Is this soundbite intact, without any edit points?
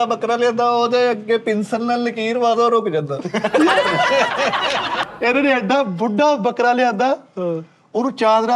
no; 1 cut; at 5.0 s

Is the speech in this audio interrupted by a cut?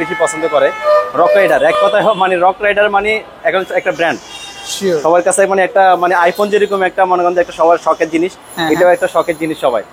no; 0 cuts

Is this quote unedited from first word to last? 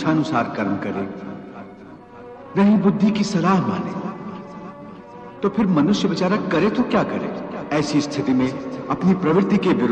no; 1 cut; at 7.5 s

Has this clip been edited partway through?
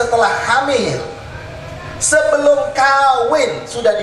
no; 0 cuts

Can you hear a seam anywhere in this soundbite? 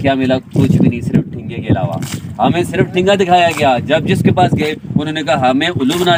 no; 0 cuts

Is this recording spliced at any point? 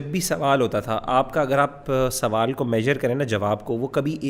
no; 0 cuts

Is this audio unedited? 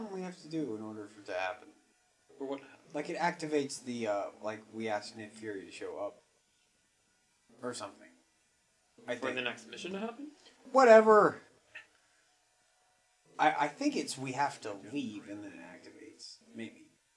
no; 1 cut; at 5.9 s

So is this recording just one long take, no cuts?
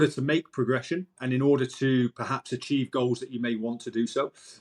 no; 1 cut; at 1.1 s

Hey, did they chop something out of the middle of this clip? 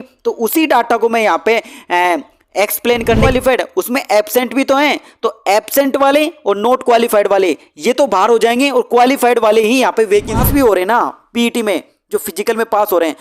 yes; 2 cuts; at 3.3 s, 10.5 s

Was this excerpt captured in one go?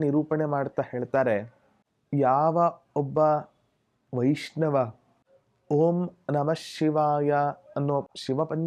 yes; 0 cuts

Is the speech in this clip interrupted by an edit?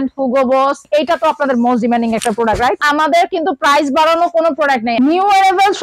yes; 2 cuts; at 0.8 s, 4.9 s

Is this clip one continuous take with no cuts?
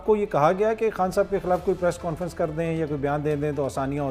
yes; 0 cuts

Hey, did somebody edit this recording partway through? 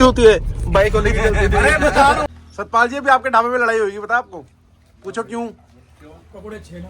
yes; 1 cut; at 2.3 s

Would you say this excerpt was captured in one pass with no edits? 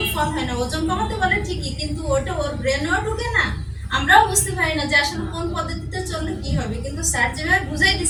yes; 0 cuts

